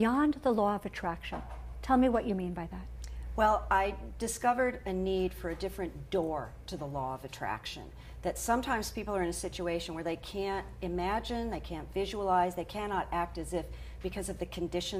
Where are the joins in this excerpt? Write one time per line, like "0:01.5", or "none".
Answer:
none